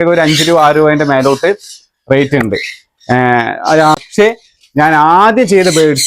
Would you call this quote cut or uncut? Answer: cut